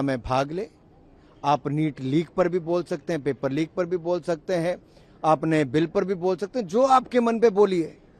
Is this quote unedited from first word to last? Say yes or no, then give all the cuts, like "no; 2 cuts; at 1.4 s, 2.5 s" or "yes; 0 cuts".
yes; 0 cuts